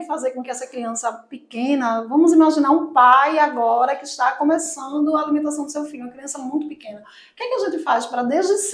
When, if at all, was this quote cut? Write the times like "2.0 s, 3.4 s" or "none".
none